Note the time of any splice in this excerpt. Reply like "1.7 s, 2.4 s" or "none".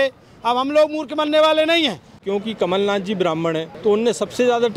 2.2 s, 3.7 s